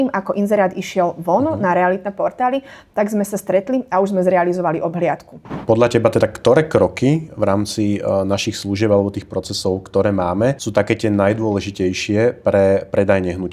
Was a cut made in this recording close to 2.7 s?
no; 2 cuts; at 5.5 s, 10.6 s

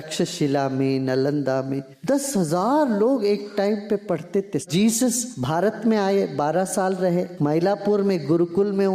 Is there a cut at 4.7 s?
yes; 4 cuts; at 1.9 s, 4.7 s, 5.3 s, 7.3 s

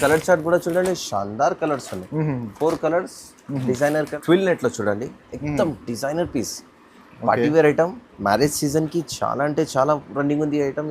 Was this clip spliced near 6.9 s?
no; 1 cut; at 4.1 s

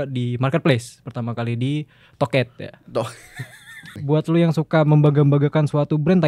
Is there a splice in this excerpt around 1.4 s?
no; 1 cut; at 3.9 s

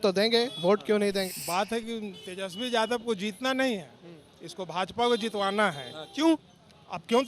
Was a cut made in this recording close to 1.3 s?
yes; 1 cut; at 1.3 s

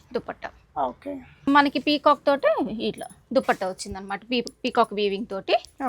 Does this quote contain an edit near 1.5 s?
yes; 1 cut; at 1.5 s

